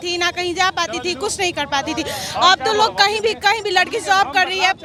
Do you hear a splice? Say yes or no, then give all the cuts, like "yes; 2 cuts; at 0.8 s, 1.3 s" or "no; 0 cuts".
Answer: no; 0 cuts